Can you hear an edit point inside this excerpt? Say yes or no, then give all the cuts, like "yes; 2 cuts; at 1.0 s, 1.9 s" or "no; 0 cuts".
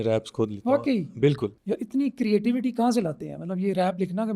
yes; 1 cut; at 1.5 s